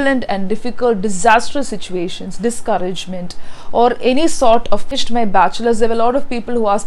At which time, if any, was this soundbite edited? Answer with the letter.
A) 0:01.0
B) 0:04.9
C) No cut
B